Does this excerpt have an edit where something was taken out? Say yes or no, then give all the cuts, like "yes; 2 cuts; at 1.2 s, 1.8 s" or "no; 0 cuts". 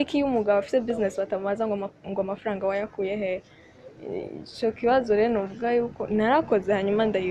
no; 0 cuts